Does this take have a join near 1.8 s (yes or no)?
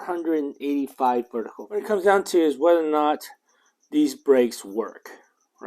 yes